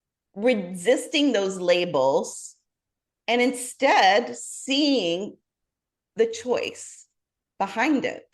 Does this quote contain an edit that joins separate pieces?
no; 0 cuts

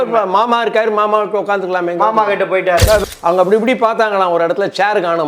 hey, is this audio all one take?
no; 1 cut; at 3.0 s

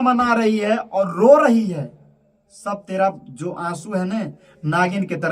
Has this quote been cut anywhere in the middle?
no; 0 cuts

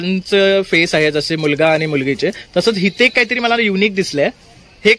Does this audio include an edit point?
no; 0 cuts

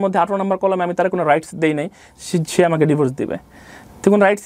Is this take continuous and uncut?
yes; 0 cuts

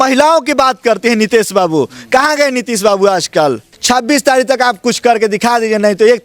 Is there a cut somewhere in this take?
yes; 1 cut; at 3.7 s

